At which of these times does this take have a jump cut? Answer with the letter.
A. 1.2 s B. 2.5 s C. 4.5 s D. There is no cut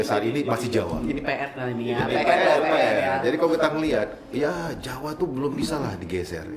D